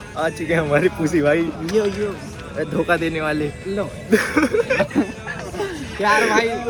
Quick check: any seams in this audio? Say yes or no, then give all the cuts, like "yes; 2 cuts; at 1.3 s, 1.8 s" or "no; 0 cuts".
no; 0 cuts